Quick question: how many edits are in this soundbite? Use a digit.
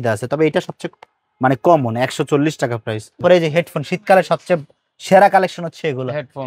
1